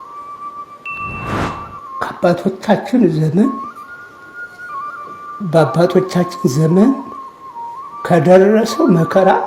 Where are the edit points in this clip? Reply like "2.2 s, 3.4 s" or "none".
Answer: none